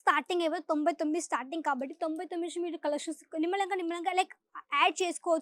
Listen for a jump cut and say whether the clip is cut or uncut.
uncut